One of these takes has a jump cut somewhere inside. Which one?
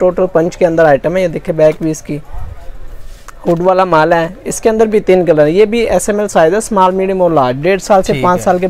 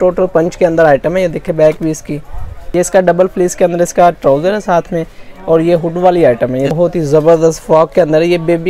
second; 2 cuts; at 2.5 s, 6.7 s

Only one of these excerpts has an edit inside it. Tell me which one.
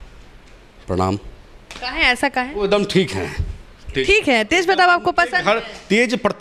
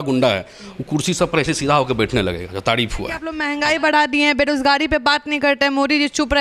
second; 1 cut; at 3.4 s

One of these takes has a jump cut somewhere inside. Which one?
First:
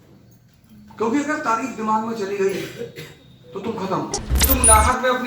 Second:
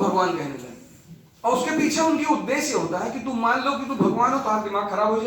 first; 1 cut; at 4.3 s

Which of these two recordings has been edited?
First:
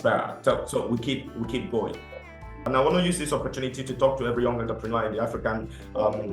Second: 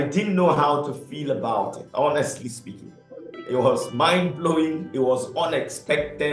first; 1 cut; at 2.6 s

